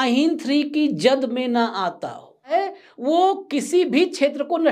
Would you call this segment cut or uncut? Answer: cut